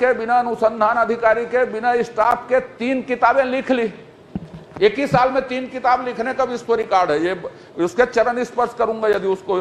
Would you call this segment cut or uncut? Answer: uncut